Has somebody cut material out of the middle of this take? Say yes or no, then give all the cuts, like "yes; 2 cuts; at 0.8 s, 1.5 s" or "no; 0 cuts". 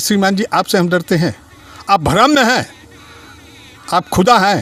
no; 0 cuts